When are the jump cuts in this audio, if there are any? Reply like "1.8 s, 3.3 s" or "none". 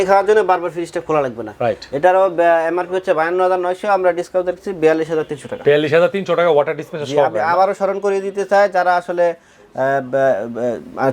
none